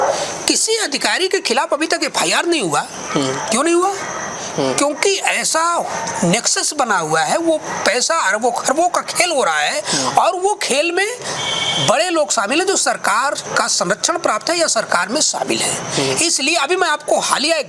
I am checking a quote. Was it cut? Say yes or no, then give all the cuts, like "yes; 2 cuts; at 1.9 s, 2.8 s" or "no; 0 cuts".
no; 0 cuts